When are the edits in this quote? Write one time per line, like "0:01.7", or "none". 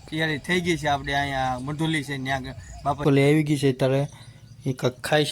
0:03.0

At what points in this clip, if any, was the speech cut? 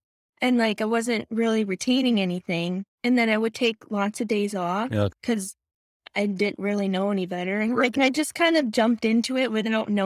0:02.9
0:05.1

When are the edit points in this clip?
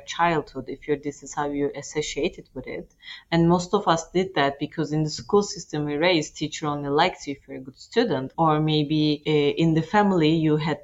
0:08.3
0:09.2

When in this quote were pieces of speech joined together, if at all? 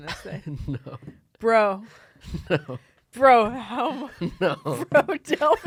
none

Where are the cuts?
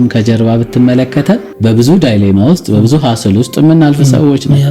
0:01.5

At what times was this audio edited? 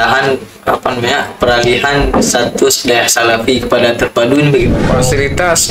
0:04.7

